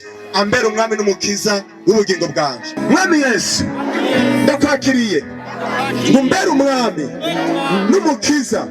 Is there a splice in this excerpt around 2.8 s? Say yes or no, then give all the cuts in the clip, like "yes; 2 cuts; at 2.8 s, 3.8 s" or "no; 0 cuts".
yes; 1 cut; at 2.8 s